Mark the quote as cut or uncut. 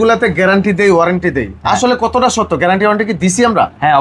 uncut